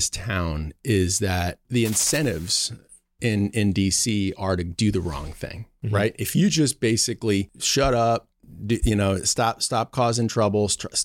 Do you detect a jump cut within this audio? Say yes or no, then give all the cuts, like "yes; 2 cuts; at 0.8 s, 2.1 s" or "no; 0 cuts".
yes; 2 cuts; at 1.6 s, 7.6 s